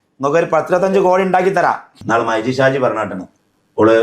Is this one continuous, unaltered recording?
no; 1 cut; at 1.9 s

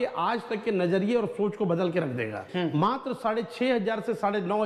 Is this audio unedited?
no; 1 cut; at 2.4 s

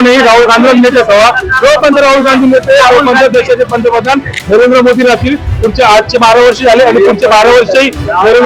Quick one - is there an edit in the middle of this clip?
no; 0 cuts

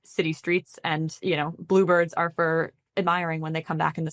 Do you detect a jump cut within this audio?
no; 0 cuts

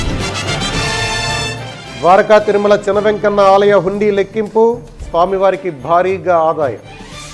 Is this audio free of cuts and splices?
no; 1 cut; at 1.4 s

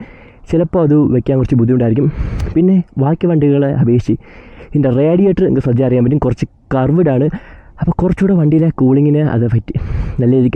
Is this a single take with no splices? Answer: yes; 0 cuts

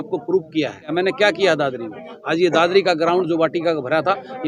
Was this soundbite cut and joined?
yes; 1 cut; at 0.9 s

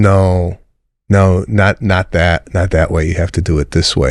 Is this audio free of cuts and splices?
yes; 0 cuts

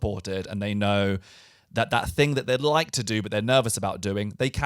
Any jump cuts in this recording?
no; 0 cuts

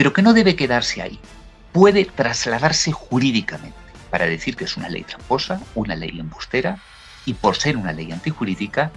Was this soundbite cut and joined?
no; 0 cuts

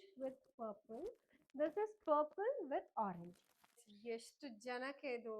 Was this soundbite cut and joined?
yes; 1 cut; at 3.9 s

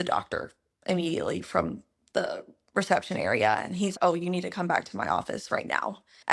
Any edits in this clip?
no; 0 cuts

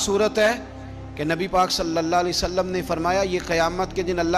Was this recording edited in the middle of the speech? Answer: no; 0 cuts

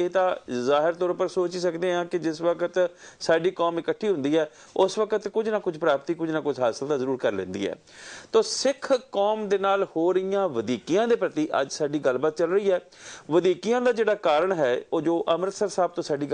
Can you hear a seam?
no; 0 cuts

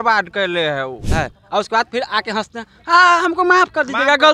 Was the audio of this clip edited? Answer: yes; 1 cut; at 1.1 s

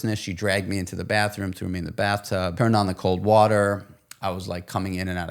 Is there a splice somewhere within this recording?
yes; 1 cut; at 2.5 s

